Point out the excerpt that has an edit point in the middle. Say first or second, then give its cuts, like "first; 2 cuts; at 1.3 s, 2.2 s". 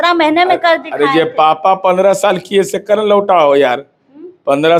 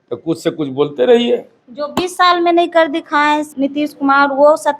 second; 1 cut; at 3.5 s